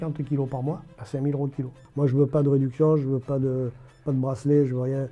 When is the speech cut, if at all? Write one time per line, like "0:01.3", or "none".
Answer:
0:00.9
0:01.8